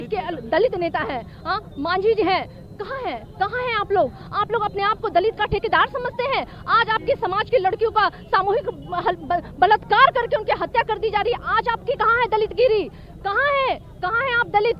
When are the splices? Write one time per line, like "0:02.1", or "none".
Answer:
none